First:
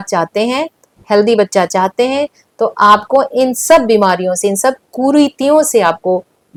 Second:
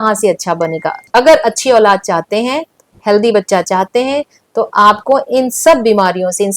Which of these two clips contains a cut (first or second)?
second